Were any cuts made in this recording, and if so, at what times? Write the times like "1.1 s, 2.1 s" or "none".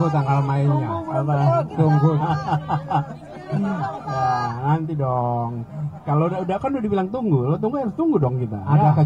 none

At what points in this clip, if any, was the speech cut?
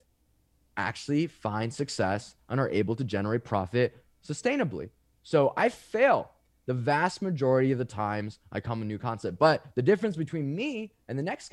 none

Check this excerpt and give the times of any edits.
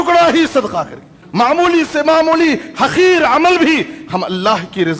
1.2 s

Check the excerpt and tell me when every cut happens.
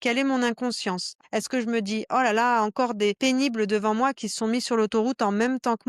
1.1 s

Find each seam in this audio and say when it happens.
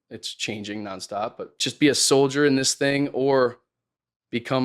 1.5 s

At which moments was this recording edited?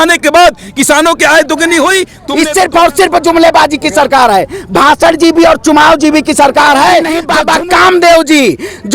2.2 s, 7.2 s

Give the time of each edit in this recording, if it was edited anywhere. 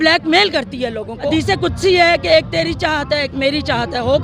1.3 s

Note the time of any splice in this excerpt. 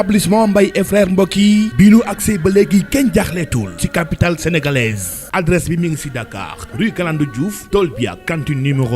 5.2 s

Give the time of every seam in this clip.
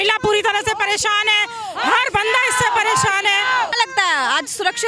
none

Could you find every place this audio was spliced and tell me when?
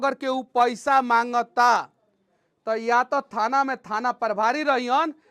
none

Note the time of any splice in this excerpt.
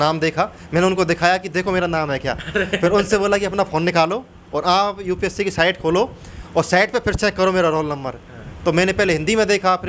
none

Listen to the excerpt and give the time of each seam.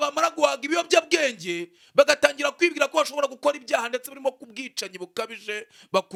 none

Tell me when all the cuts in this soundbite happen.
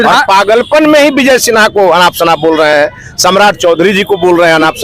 none

